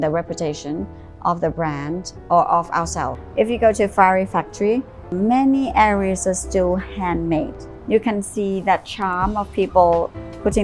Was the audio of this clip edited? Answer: yes; 3 cuts; at 3.2 s, 5.1 s, 7.7 s

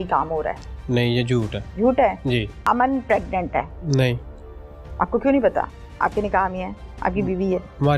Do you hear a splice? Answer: yes; 3 cuts; at 1.6 s, 2.6 s, 3.8 s

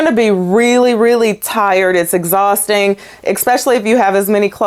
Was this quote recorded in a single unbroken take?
yes; 0 cuts

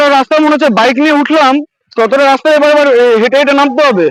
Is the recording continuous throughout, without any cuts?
yes; 0 cuts

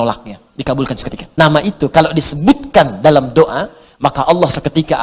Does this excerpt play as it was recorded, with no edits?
no; 1 cut; at 1.2 s

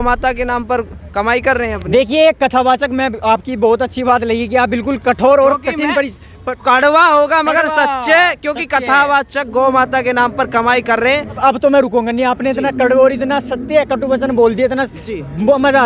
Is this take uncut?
no; 1 cut; at 11.4 s

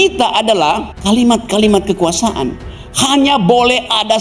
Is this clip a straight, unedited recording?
no; 1 cut; at 0.9 s

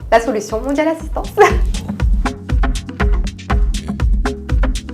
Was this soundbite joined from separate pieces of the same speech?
yes; 1 cut; at 1.7 s

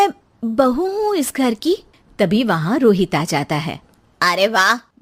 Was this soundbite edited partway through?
no; 0 cuts

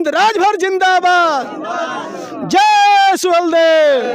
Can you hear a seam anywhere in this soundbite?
no; 0 cuts

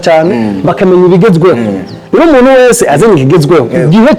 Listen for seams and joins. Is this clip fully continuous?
yes; 0 cuts

